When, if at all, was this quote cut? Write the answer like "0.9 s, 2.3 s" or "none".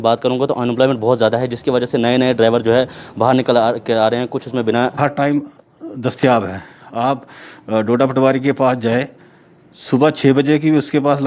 4.9 s